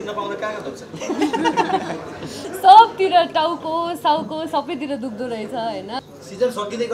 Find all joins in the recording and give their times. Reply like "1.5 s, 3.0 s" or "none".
2.5 s, 6.0 s